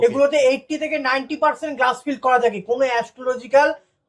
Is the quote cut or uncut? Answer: uncut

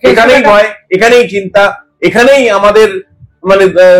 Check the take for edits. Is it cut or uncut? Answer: uncut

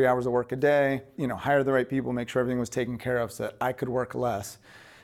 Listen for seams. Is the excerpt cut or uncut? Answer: cut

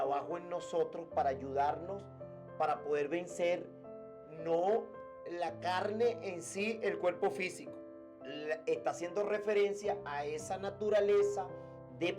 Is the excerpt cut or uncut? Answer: uncut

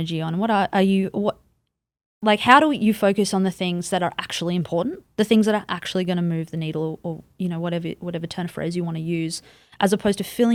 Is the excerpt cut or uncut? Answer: uncut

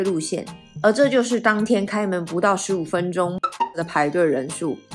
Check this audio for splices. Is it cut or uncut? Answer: cut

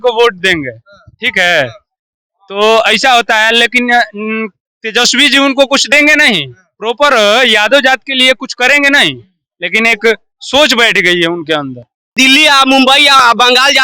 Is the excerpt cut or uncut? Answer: cut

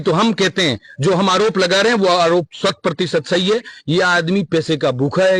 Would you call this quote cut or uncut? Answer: uncut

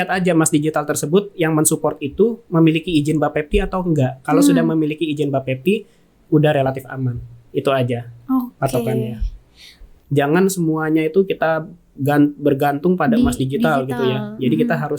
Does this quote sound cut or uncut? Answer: cut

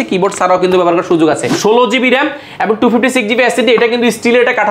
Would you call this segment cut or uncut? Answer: cut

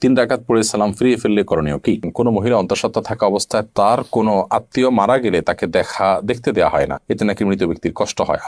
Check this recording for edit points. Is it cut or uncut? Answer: cut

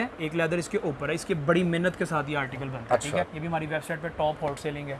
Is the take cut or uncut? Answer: cut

